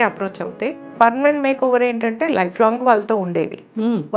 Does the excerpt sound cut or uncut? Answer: cut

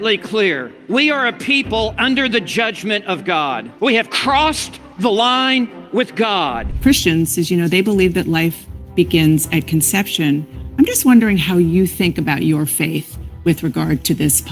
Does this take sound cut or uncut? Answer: cut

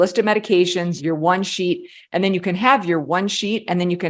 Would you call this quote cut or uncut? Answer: cut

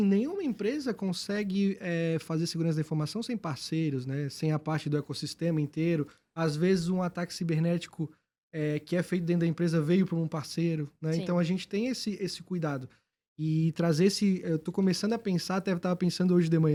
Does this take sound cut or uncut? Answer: uncut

